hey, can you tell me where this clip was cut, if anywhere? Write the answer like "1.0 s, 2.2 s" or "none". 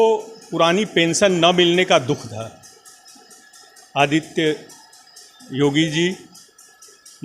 none